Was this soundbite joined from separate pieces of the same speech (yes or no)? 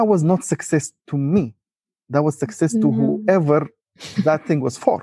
no